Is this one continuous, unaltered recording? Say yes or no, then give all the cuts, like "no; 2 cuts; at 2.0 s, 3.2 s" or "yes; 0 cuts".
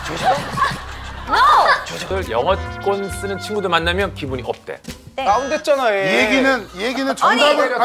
no; 1 cut; at 2.0 s